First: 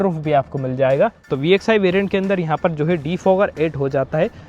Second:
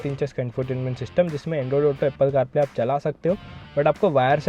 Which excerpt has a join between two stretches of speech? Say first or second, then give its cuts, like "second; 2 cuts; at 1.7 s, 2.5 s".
first; 1 cut; at 1.3 s